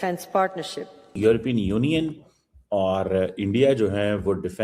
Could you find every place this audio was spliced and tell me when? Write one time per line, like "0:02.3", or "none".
0:01.1